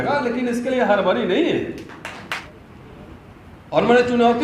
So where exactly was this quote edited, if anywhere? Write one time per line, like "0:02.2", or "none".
0:02.4